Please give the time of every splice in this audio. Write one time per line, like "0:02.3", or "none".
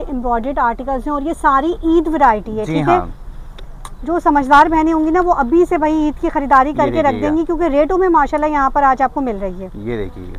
none